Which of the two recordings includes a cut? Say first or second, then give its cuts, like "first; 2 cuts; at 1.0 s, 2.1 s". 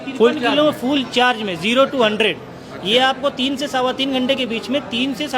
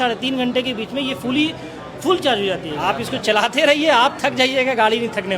second; 1 cut; at 2.7 s